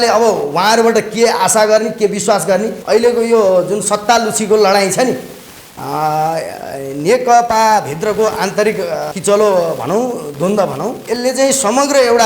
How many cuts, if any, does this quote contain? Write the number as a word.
three